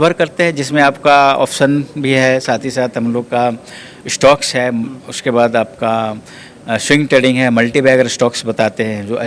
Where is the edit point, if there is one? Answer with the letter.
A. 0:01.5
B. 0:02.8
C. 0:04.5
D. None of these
D